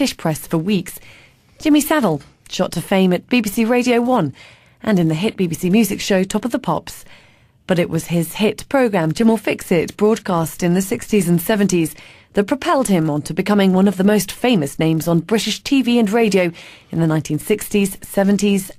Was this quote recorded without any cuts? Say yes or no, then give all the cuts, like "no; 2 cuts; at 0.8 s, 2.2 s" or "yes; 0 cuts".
yes; 0 cuts